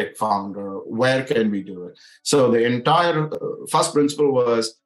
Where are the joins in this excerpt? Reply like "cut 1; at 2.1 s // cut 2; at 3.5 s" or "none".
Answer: cut 1; at 3.3 s